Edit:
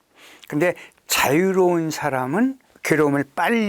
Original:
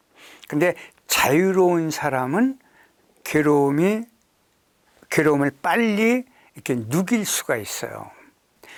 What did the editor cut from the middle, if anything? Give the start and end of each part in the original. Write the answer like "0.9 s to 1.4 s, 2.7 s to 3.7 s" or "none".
2.7 s to 5.0 s